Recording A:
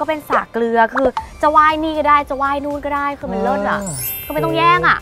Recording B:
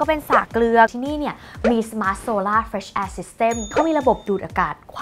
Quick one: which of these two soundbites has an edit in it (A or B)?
B